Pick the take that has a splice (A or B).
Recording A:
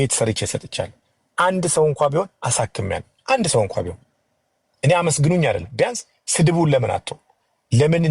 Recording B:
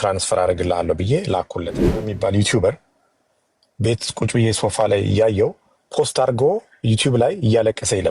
B